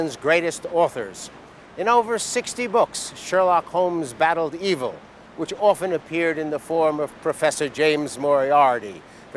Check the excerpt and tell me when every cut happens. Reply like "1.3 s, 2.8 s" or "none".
6.1 s